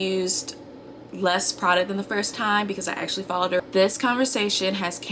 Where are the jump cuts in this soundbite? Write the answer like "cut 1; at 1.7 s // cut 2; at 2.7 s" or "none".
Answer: cut 1; at 3.6 s

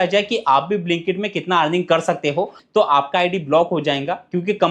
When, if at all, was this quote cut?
cut 1; at 2.6 s

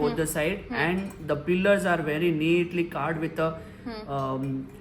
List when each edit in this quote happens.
none

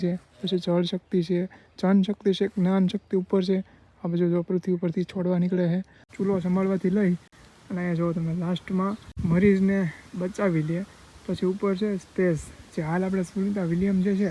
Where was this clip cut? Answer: cut 1; at 6.0 s // cut 2; at 9.1 s

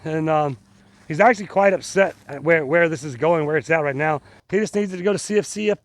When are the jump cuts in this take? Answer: cut 1; at 4.3 s

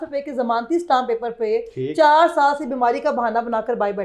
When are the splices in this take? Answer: none

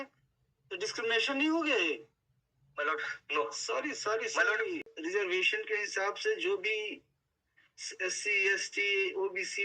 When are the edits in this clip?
cut 1; at 4.9 s

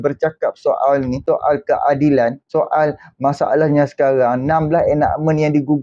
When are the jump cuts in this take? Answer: cut 1; at 1.2 s // cut 2; at 2.4 s

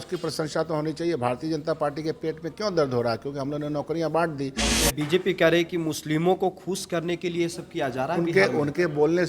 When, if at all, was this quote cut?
cut 1; at 4.7 s

